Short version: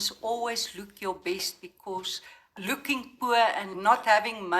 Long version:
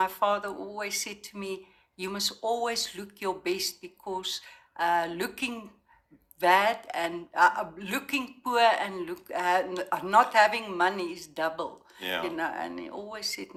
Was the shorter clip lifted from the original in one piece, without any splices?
no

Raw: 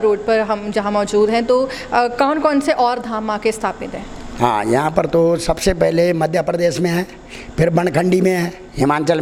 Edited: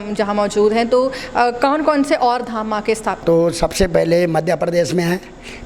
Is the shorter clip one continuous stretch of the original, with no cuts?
no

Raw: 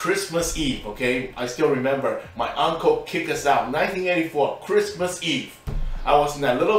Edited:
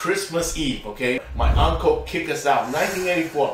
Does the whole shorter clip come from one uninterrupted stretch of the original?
no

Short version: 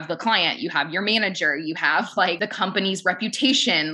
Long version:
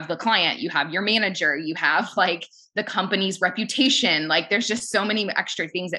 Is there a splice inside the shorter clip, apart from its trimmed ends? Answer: yes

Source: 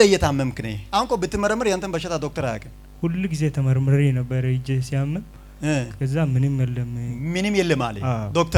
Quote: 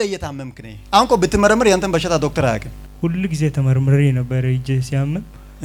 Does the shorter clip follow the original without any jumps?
yes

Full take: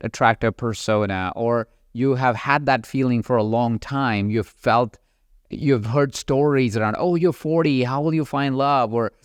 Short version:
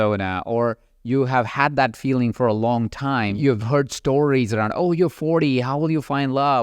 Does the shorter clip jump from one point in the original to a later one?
yes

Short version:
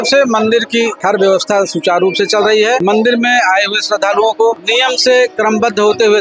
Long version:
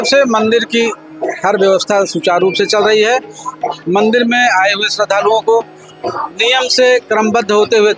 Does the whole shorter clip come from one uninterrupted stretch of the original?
no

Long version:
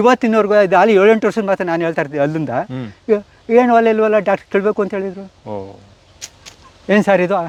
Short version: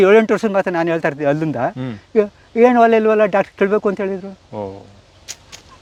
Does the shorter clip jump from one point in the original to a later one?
no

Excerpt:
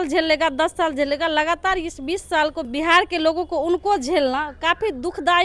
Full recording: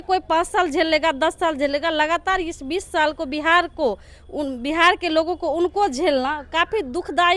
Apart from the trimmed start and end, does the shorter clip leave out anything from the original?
yes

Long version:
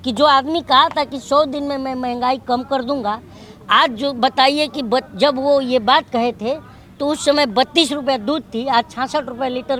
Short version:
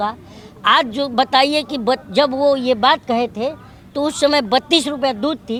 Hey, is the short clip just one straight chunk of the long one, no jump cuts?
yes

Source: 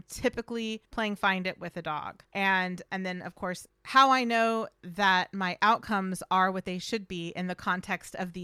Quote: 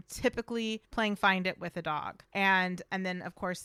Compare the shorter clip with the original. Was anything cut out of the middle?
no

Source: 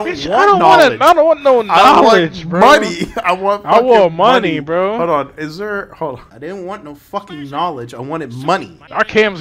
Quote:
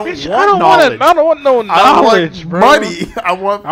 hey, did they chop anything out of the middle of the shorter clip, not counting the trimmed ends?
no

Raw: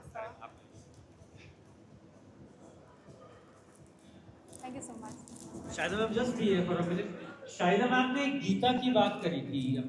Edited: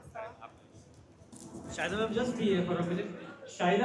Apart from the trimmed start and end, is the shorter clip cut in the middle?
yes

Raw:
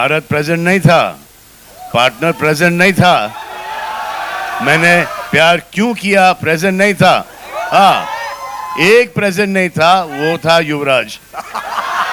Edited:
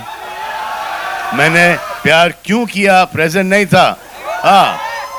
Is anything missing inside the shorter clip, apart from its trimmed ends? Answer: no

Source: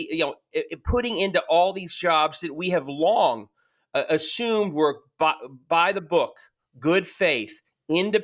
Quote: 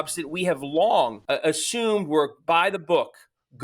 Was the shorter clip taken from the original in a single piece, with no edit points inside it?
no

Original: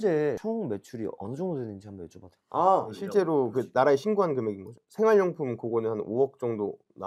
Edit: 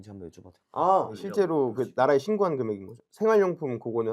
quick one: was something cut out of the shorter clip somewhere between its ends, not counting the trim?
no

